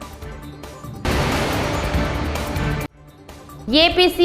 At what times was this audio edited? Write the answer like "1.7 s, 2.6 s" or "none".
3.0 s